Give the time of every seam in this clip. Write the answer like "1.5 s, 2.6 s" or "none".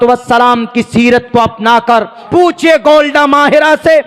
2.2 s